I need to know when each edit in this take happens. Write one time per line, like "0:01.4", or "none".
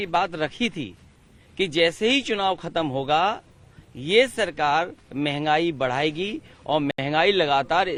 none

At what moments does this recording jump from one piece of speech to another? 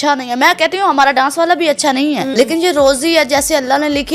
0:02.3

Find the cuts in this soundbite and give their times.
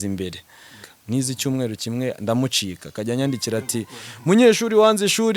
0:00.9

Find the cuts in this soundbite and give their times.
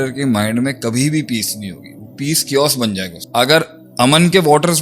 0:03.2

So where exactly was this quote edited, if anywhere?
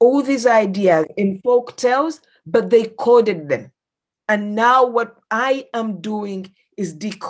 none

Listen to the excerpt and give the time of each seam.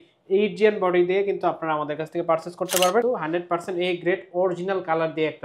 0:03.0

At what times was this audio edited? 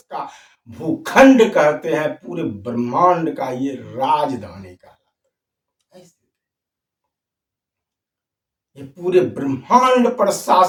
none

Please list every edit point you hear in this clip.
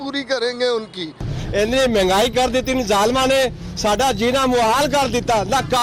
0:01.2

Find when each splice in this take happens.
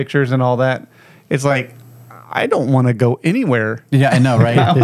none

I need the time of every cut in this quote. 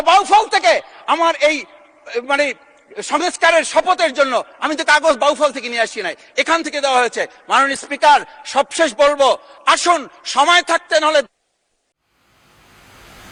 none

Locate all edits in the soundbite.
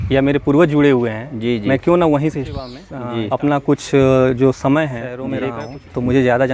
0:02.9
0:05.4

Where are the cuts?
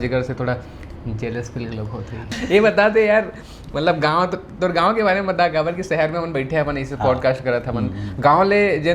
0:02.3

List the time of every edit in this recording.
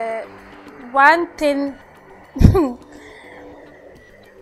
none

